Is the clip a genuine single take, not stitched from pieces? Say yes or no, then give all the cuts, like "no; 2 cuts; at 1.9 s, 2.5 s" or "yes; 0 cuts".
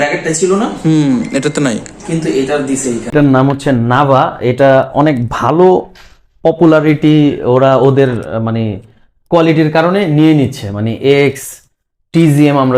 no; 1 cut; at 3.1 s